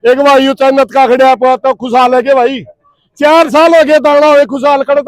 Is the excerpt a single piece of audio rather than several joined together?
yes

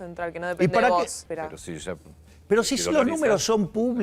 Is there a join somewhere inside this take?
yes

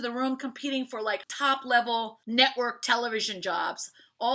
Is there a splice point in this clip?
yes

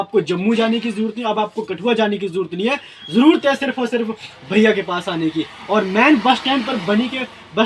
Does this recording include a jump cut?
no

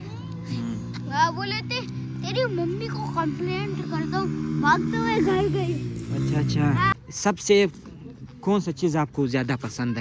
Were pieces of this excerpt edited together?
yes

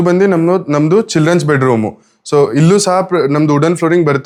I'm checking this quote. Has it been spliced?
no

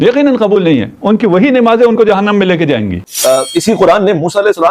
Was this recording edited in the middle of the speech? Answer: yes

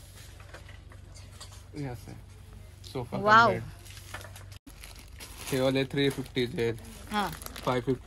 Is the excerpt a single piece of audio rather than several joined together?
no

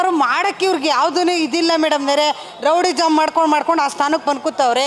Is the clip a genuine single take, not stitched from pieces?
yes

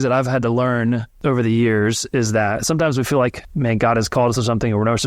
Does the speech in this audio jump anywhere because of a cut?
yes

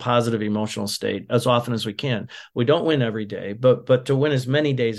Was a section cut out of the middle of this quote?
no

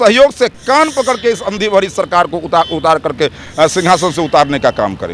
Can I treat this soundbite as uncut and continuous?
yes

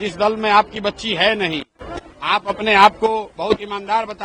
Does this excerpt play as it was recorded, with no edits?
yes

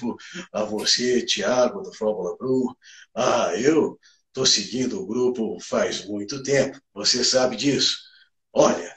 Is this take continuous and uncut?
yes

